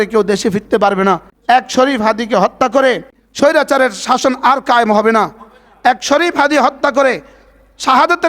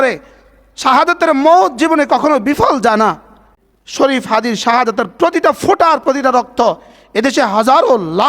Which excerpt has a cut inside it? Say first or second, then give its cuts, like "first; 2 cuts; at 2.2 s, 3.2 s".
first; 2 cuts; at 1.3 s, 3.2 s